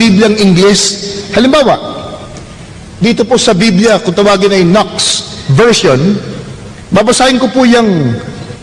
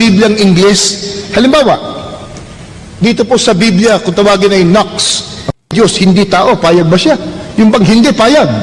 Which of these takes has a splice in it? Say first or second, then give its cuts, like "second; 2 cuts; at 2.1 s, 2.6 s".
second; 1 cut; at 5.6 s